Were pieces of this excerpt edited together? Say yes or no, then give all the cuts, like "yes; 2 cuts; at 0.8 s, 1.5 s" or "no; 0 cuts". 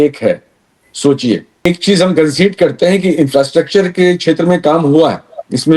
yes; 1 cut; at 1.7 s